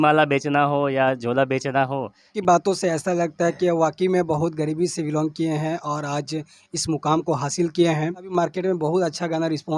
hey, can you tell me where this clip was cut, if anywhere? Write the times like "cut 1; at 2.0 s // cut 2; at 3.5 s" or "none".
cut 1; at 2.2 s // cut 2; at 8.3 s